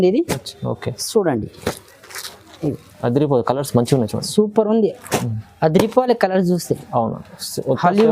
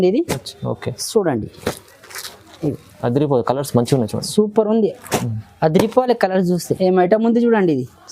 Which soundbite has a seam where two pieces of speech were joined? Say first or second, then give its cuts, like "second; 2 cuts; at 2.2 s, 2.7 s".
second; 1 cut; at 6.7 s